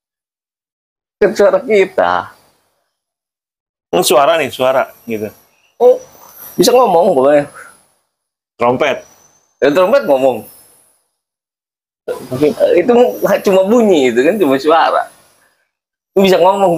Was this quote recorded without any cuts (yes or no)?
yes